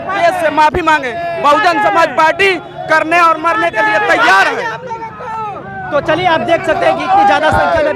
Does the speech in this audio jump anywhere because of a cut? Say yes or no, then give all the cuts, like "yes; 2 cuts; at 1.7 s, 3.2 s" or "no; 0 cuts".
no; 0 cuts